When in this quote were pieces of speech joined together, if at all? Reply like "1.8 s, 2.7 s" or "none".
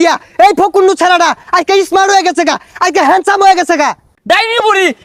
4.1 s